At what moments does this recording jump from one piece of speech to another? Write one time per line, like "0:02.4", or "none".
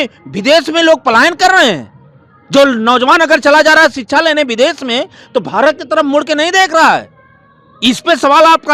none